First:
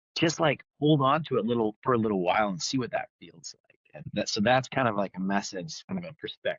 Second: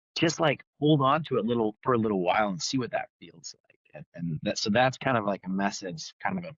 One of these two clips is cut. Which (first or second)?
first